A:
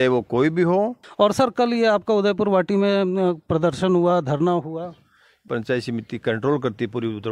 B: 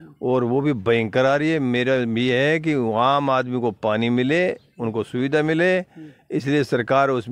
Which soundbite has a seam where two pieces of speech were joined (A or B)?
A